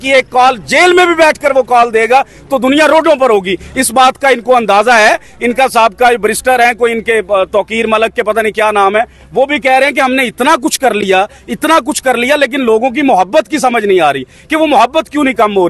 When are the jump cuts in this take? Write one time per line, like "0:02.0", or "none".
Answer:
none